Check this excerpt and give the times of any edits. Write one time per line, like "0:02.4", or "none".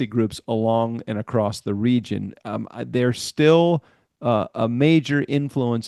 none